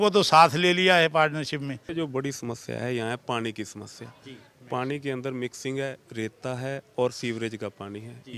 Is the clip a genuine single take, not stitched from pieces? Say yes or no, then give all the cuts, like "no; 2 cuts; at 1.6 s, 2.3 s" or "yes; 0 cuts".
no; 1 cut; at 1.8 s